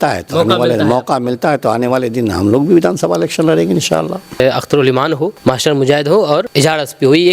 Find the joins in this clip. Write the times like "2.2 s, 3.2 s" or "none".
4.4 s, 5.4 s, 6.5 s